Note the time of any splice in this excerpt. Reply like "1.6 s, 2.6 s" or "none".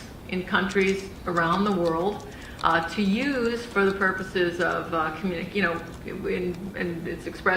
4.9 s